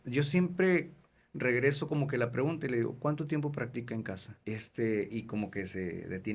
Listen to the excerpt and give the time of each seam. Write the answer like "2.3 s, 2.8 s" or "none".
4.3 s